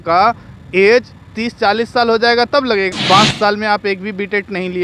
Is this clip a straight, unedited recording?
no; 1 cut; at 2.9 s

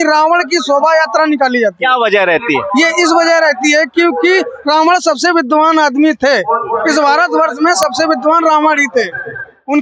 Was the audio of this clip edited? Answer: no; 0 cuts

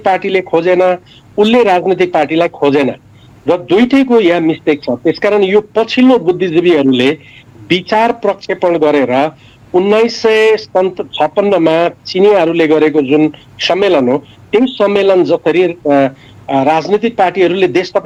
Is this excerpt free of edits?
yes; 0 cuts

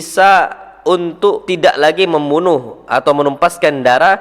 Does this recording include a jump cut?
yes; 1 cut; at 1.5 s

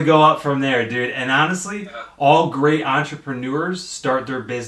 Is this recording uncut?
yes; 0 cuts

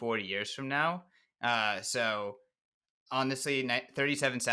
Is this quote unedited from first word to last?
yes; 0 cuts

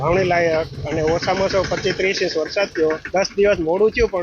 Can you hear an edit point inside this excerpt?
yes; 1 cut; at 3.0 s

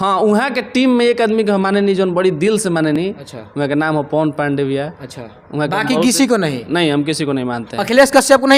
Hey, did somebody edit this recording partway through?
no; 0 cuts

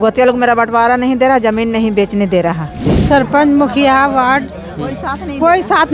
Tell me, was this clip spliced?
yes; 1 cut; at 3.0 s

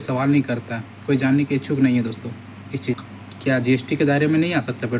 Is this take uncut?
no; 1 cut; at 3.0 s

